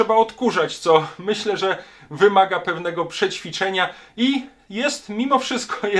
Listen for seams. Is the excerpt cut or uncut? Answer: uncut